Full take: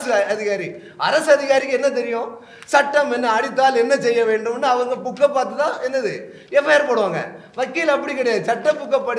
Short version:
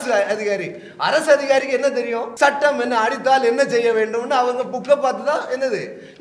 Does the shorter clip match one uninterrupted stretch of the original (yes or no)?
no